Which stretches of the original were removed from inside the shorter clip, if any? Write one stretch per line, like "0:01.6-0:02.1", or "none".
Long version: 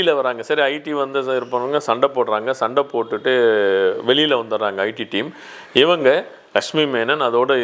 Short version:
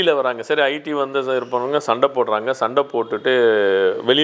none